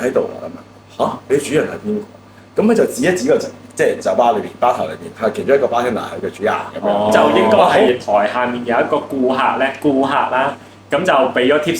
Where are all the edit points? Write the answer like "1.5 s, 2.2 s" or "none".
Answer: 7.9 s